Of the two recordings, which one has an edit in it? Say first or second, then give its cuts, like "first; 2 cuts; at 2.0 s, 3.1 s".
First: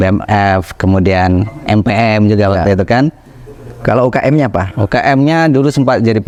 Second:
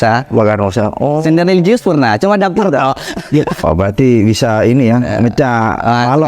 second; 1 cut; at 3.6 s